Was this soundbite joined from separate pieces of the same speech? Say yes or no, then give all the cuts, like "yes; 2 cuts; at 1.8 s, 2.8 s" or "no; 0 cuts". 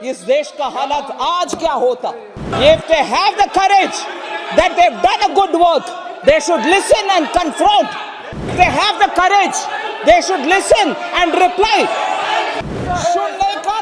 yes; 3 cuts; at 2.5 s, 8.5 s, 12.6 s